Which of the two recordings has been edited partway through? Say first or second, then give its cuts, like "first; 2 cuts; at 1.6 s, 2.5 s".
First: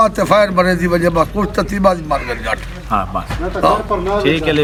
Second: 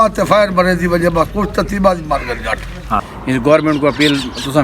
second; 1 cut; at 3.1 s